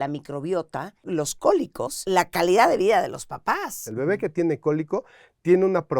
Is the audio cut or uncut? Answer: cut